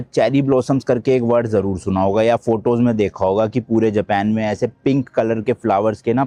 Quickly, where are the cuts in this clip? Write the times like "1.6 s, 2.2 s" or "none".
none